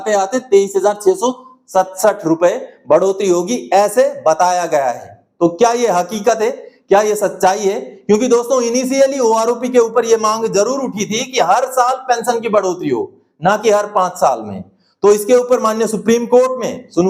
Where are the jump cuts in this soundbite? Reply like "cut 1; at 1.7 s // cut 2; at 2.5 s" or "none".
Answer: none